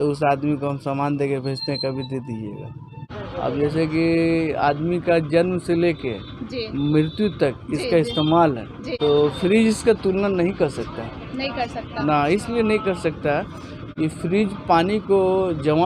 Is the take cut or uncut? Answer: cut